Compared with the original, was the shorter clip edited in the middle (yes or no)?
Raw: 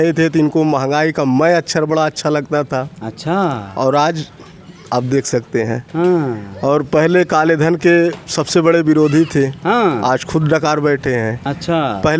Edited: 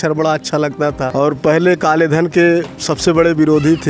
yes